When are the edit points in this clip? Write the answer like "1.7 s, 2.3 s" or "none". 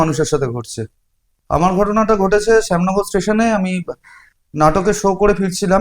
none